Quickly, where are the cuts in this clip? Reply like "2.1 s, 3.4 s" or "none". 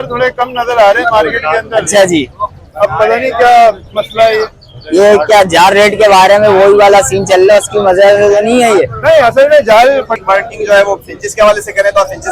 10.2 s